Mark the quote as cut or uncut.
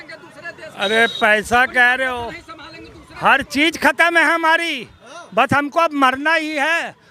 uncut